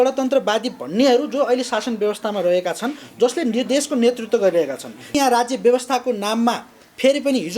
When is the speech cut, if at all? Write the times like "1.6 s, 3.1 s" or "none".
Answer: 5.2 s